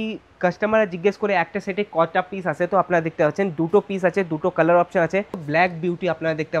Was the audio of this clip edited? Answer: yes; 1 cut; at 5.4 s

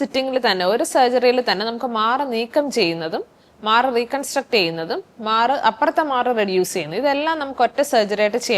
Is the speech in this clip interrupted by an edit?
no; 0 cuts

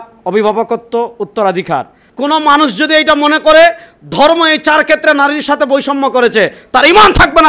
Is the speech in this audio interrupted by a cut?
yes; 1 cut; at 2.0 s

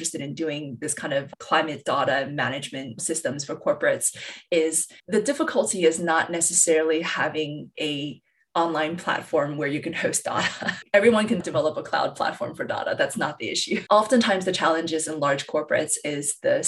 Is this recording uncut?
yes; 0 cuts

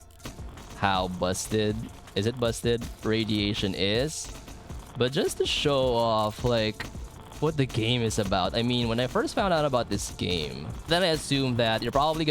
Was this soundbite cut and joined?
yes; 1 cut; at 10.9 s

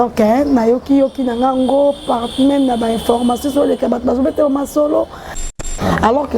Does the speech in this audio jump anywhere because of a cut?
yes; 1 cut; at 5.5 s

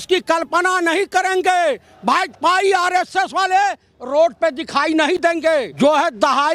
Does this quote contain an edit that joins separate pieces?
yes; 1 cut; at 5.2 s

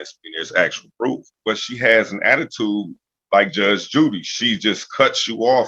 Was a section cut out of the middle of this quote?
yes; 1 cut; at 1.1 s

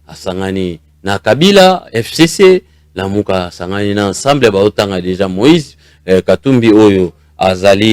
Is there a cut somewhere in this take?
no; 0 cuts

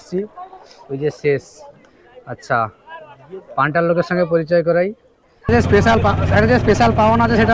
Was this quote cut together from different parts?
yes; 1 cut; at 5.4 s

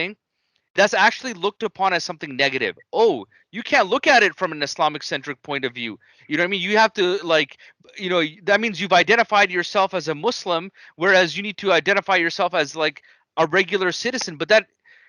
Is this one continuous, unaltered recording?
yes; 0 cuts

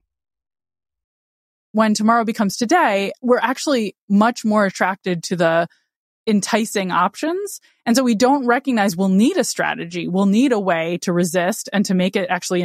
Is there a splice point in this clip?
yes; 2 cuts; at 1.7 s, 3.1 s

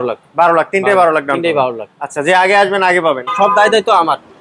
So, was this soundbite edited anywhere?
yes; 1 cut; at 3.3 s

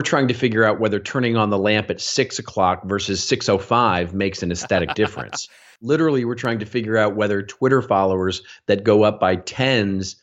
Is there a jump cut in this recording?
yes; 1 cut; at 5.6 s

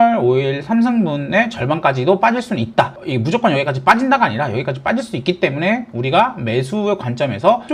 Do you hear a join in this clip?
no; 0 cuts

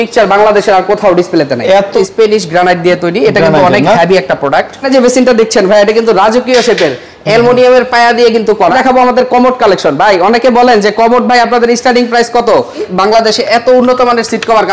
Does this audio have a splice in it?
yes; 4 cuts; at 1.9 s, 4.9 s, 8.7 s, 12.9 s

